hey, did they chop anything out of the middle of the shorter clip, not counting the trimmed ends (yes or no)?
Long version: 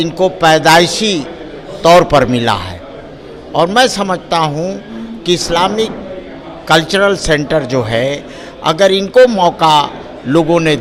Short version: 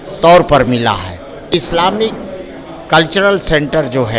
yes